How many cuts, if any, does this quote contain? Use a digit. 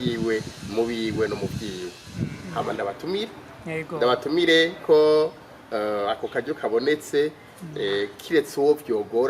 1